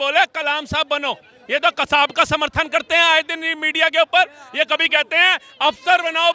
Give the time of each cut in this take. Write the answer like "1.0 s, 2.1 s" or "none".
none

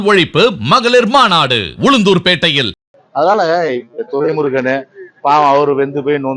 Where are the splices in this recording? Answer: 2.9 s

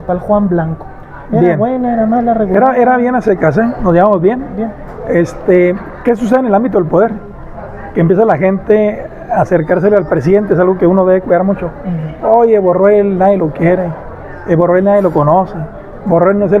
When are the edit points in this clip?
none

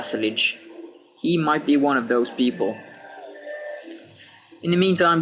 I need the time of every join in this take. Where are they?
2.9 s

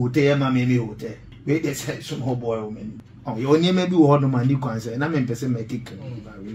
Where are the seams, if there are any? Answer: 1.3 s, 3.0 s

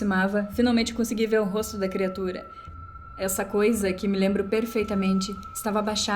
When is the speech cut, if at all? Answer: 2.7 s

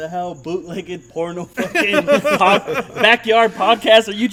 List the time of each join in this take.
none

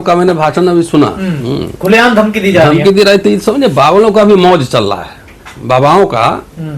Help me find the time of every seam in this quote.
none

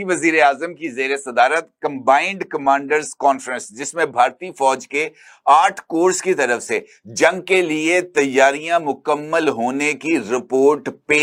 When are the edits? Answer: none

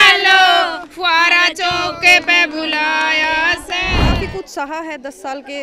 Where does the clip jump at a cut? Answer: 4.0 s

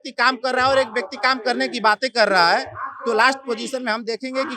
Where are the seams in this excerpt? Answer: none

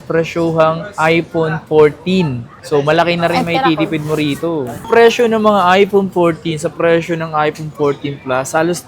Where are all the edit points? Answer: 4.7 s

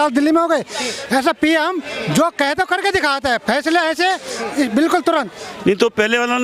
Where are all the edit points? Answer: 5.4 s

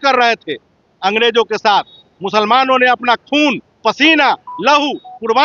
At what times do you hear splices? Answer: none

